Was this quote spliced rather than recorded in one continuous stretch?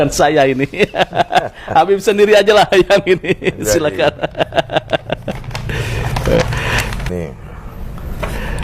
yes; 1 cut; at 7.1 s

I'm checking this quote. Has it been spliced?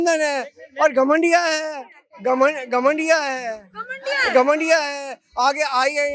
no; 0 cuts

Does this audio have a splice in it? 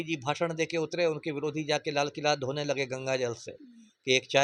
no; 0 cuts

